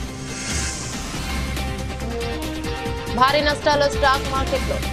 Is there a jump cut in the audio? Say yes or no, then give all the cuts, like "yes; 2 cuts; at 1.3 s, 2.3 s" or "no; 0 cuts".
no; 0 cuts